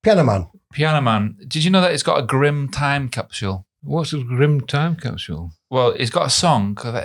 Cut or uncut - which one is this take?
cut